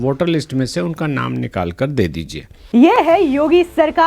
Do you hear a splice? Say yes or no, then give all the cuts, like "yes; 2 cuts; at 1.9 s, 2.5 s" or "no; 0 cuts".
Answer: no; 0 cuts